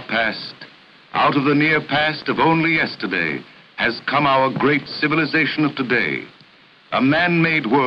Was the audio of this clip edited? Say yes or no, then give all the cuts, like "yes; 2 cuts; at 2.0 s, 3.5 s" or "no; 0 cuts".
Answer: yes; 1 cut; at 2.8 s